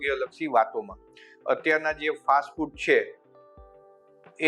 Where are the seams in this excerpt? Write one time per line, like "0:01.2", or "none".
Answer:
none